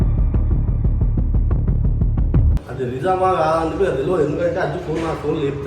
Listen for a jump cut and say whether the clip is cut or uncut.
uncut